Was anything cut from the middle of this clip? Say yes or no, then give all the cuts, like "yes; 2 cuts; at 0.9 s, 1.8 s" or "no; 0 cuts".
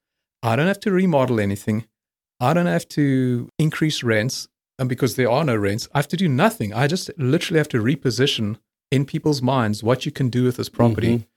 no; 0 cuts